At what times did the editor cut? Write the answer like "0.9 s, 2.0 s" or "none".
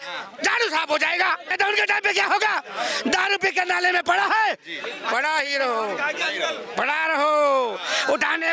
1.5 s